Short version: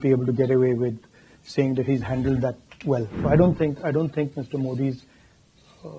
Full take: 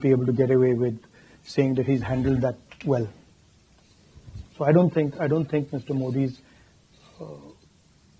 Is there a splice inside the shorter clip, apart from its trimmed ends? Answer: yes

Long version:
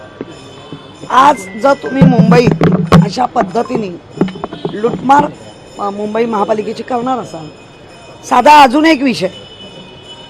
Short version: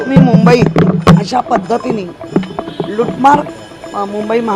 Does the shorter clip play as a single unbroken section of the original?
yes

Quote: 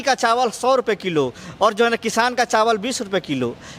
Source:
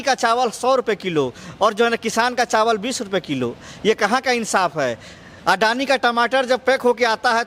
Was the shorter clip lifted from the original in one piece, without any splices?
yes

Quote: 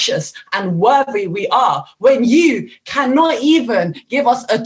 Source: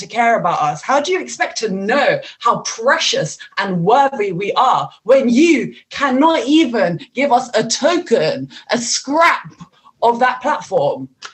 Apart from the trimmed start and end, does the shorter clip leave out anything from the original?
no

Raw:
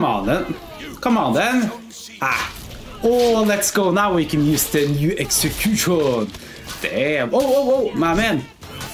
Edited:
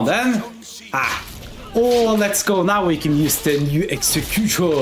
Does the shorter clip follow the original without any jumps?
yes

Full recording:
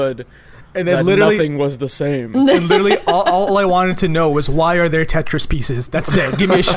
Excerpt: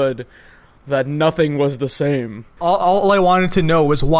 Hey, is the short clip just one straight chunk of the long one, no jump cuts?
no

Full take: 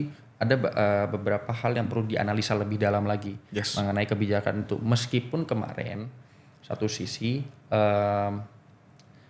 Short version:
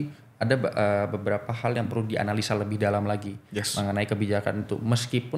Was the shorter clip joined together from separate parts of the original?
no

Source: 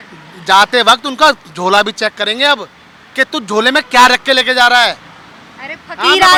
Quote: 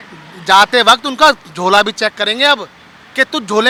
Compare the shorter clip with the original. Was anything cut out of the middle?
no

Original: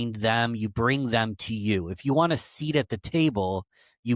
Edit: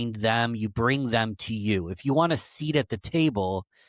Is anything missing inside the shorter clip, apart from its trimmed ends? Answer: no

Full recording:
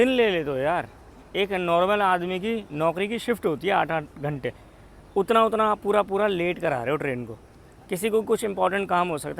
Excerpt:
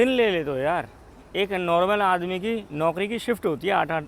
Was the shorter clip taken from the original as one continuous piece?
yes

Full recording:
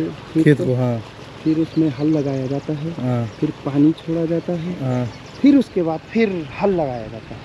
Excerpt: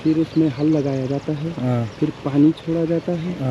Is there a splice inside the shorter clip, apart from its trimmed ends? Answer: no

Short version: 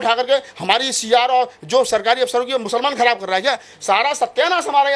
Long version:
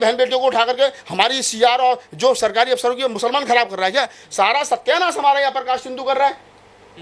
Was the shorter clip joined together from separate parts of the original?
no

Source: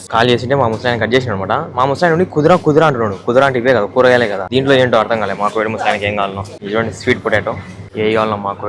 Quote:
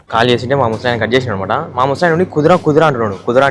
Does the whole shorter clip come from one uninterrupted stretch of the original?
yes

